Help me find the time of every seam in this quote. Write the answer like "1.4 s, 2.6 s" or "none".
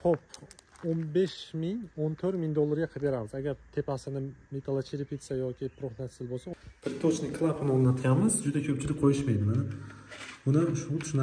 6.5 s